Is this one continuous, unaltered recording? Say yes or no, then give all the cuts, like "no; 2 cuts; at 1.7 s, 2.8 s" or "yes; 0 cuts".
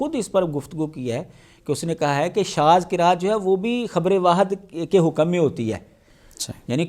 yes; 0 cuts